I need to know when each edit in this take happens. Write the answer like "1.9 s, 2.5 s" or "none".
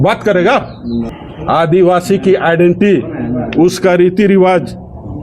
1.2 s